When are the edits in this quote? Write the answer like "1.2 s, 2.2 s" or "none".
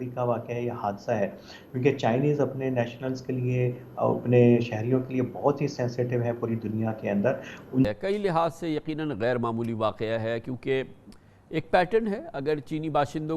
7.9 s